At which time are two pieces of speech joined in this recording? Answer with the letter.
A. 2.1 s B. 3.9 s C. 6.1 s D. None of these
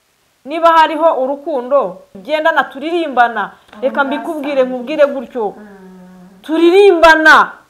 A